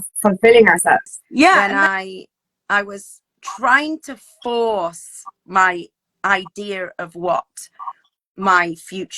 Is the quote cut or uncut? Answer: cut